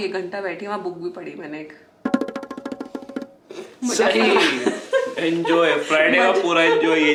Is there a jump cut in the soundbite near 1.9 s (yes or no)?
no